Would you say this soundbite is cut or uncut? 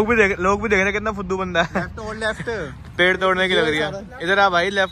uncut